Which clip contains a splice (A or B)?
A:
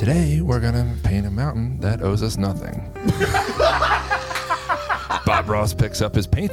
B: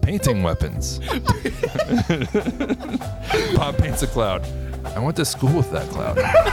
B